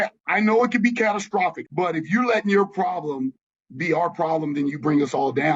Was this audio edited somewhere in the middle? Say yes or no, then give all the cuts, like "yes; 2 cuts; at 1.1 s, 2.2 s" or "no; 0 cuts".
yes; 1 cut; at 1.6 s